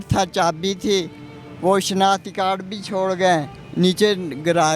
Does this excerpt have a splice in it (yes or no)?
no